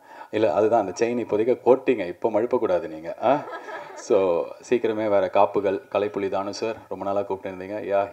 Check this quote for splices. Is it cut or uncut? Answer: uncut